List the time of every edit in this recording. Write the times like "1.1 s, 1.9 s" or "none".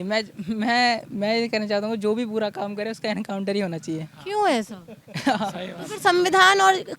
none